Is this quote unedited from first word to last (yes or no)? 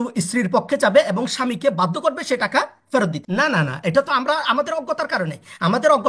no